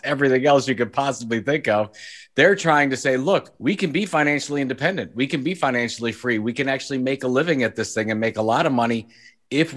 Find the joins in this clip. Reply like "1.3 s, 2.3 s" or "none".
3.5 s